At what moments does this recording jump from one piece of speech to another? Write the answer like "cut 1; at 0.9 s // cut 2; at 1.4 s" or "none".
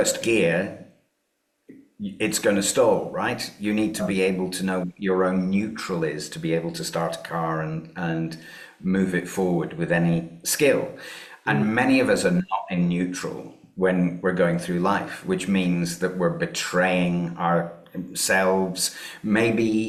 none